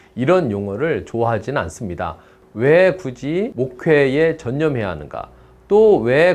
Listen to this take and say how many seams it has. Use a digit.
2